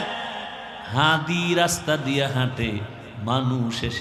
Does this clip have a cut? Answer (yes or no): no